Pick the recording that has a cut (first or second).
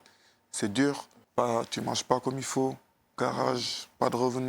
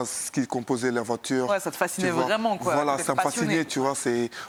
first